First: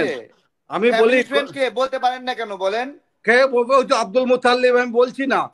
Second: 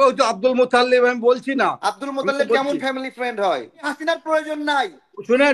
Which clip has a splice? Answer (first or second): second